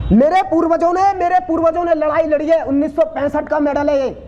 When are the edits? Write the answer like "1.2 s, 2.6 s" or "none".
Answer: none